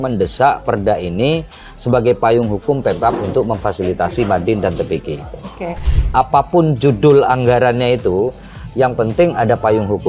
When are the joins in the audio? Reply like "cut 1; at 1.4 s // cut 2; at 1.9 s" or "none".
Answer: cut 1; at 5.9 s